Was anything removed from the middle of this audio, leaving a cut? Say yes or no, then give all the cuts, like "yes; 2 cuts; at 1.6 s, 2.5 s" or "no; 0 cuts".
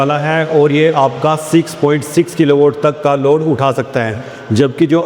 no; 0 cuts